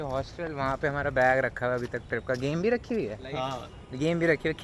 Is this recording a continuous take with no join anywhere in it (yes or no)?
yes